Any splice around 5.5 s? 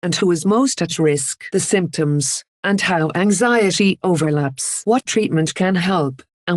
yes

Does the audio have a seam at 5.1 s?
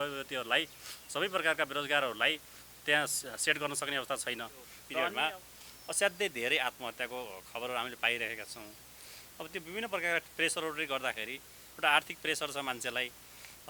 yes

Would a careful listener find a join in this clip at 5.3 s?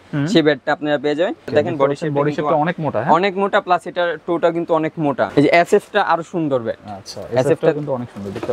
yes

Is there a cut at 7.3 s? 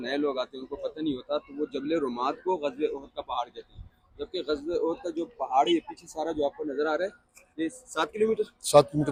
no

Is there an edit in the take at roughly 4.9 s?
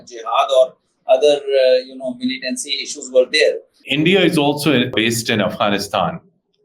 yes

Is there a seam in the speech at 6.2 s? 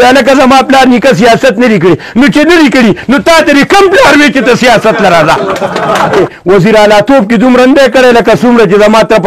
yes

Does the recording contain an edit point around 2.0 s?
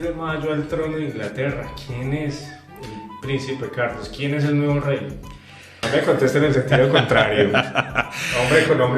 no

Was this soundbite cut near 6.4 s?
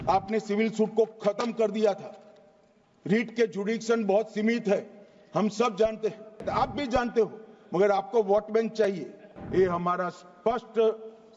yes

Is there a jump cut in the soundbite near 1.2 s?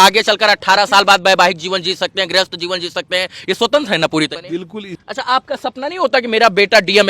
no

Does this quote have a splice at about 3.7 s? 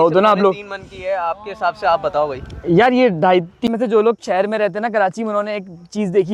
yes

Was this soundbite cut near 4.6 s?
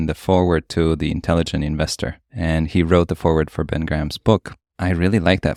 no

